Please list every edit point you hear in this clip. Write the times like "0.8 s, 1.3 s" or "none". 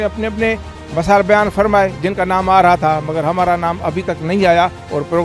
none